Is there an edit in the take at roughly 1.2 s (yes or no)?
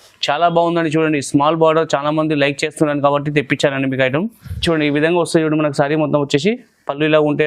no